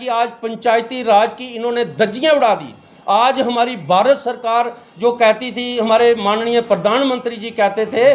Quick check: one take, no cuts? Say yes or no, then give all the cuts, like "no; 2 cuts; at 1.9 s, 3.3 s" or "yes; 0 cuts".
yes; 0 cuts